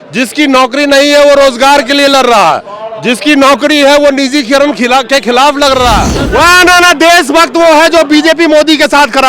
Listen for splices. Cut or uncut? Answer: cut